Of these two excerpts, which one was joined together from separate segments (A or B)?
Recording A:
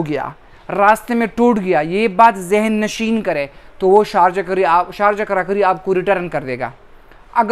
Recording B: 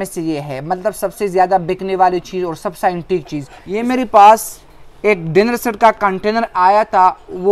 B